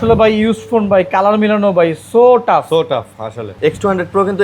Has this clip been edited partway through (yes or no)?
yes